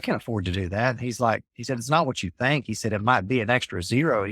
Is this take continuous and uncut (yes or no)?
yes